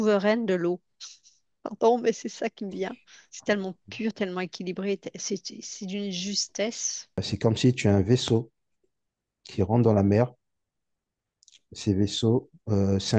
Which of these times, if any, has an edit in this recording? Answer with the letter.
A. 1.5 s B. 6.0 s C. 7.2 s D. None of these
C